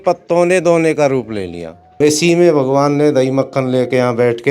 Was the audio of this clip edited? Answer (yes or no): yes